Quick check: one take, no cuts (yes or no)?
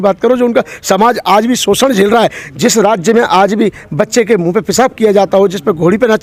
yes